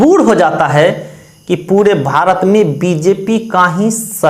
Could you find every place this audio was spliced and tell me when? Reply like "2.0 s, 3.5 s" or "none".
none